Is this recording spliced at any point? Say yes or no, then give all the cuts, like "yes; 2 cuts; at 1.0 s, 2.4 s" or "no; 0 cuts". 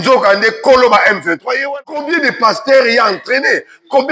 yes; 1 cut; at 1.5 s